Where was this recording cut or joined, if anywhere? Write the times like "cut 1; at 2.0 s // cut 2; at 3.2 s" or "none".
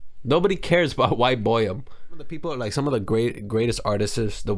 cut 1; at 2.4 s